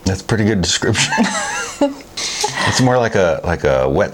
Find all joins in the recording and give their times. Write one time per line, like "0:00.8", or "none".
0:02.0